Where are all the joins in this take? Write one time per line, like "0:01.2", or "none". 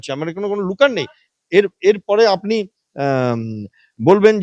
none